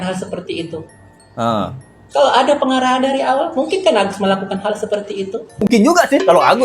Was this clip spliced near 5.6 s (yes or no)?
yes